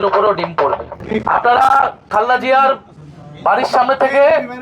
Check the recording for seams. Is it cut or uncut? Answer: cut